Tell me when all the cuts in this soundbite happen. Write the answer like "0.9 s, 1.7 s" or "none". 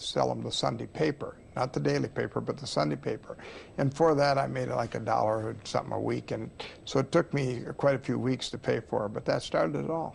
3.1 s

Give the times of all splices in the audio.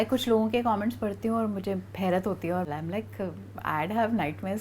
2.7 s

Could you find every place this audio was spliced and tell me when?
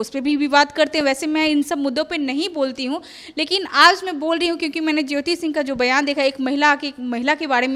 none

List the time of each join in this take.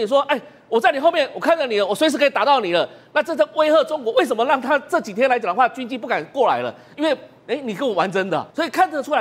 none

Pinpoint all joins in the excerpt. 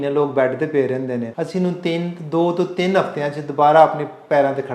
1.3 s

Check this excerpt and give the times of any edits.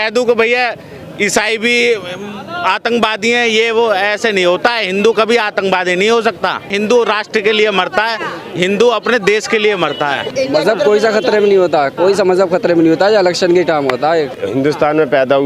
10.3 s, 14.4 s

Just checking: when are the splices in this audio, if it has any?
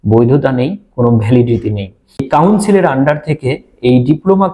2.3 s

